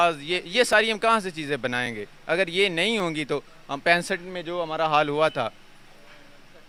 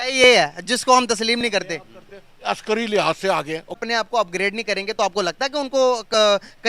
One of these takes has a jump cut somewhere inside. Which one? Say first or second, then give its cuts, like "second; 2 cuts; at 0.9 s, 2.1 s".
second; 1 cut; at 3.8 s